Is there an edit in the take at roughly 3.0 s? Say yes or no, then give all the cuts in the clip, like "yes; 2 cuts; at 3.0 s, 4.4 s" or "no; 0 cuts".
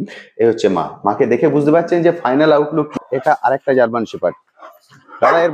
yes; 1 cut; at 3.0 s